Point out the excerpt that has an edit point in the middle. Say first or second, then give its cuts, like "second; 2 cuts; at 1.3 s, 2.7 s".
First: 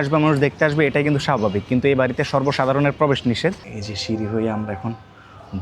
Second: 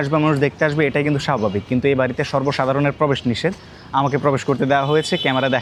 first; 1 cut; at 3.7 s